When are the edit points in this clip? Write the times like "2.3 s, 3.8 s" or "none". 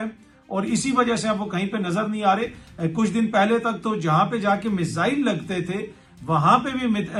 none

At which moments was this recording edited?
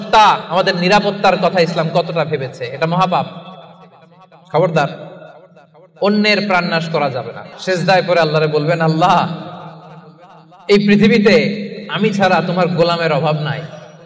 7.4 s

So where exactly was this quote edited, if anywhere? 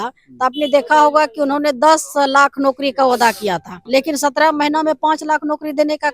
3.7 s

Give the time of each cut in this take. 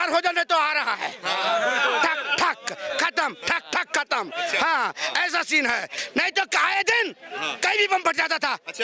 6.0 s

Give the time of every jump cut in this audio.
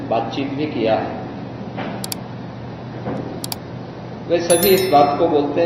none

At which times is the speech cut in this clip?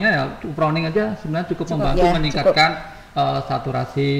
none

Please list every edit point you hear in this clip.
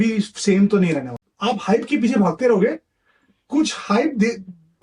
1.3 s

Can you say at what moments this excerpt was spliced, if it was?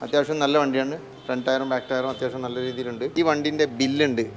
3.1 s

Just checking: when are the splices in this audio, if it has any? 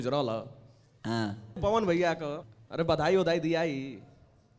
1.6 s, 2.4 s

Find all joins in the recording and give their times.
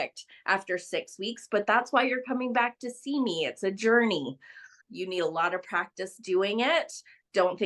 4.7 s

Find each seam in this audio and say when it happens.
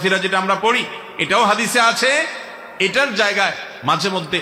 none

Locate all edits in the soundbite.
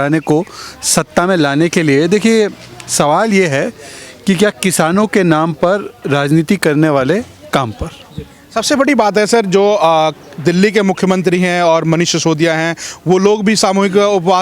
none

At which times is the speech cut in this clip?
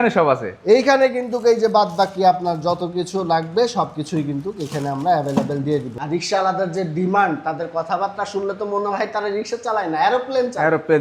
5.9 s

